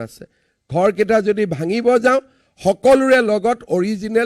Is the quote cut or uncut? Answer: uncut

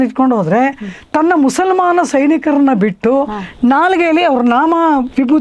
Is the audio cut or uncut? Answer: uncut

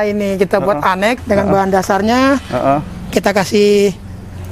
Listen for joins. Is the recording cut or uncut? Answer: cut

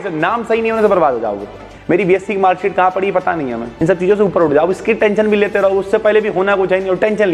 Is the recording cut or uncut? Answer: cut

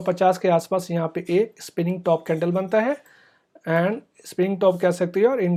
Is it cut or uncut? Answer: uncut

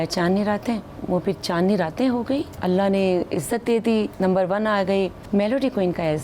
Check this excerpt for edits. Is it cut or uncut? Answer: cut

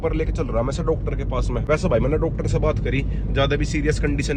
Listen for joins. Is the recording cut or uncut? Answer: uncut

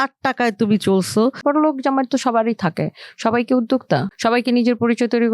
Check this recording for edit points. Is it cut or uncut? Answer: cut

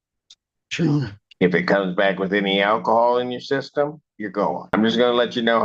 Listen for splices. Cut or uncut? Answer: cut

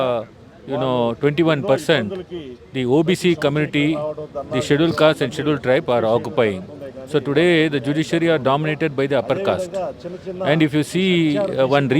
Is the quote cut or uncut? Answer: uncut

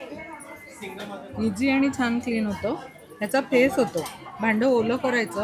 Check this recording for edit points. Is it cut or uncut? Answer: uncut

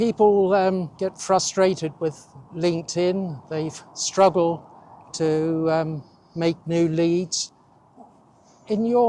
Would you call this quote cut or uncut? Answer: cut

